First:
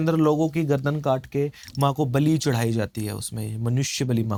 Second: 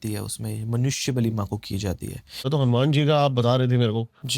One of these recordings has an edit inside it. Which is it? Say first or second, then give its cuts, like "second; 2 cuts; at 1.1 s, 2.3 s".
second; 1 cut; at 2.5 s